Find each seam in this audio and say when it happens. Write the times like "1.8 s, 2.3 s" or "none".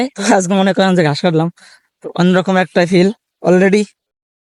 none